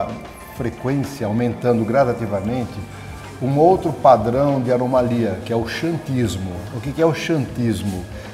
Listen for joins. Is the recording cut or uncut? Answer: uncut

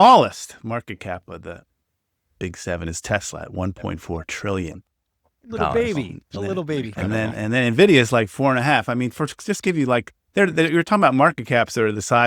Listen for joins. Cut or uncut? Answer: uncut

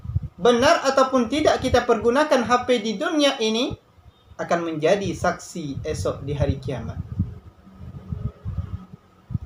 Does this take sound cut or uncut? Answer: uncut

